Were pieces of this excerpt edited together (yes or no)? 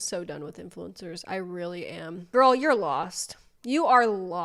yes